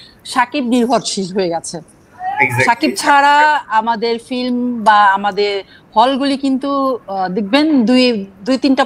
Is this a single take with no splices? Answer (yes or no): yes